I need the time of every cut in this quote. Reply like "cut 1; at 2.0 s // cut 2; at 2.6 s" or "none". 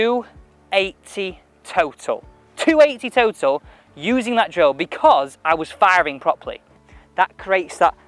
cut 1; at 6.9 s

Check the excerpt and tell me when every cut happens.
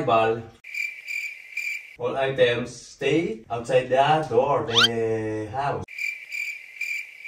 none

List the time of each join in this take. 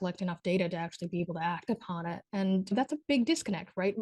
cut 1; at 2.7 s

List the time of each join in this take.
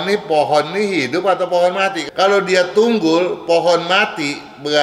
cut 1; at 2.0 s

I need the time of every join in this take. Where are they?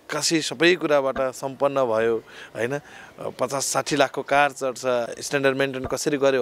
cut 1; at 5.1 s

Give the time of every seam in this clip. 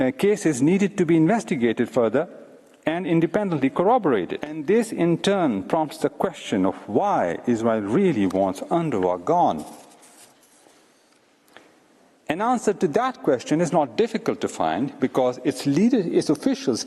cut 1; at 4.5 s

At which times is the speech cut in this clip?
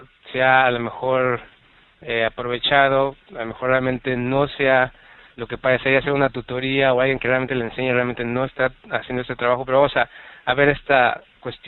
none

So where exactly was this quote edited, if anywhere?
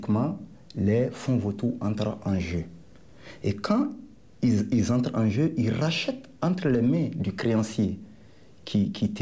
none

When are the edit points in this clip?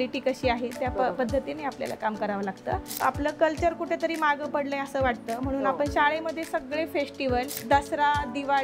cut 1; at 2.9 s // cut 2; at 7.6 s

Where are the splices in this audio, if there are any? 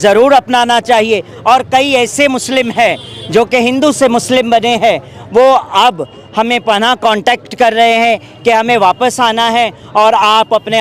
none

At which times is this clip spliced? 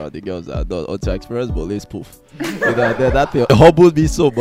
cut 1; at 3.5 s

